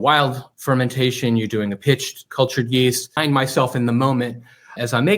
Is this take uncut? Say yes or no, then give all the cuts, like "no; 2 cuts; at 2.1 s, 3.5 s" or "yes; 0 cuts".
no; 1 cut; at 3.2 s